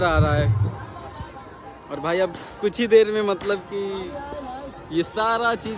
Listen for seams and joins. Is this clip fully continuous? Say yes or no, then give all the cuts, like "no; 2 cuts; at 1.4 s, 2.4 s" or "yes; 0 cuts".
yes; 0 cuts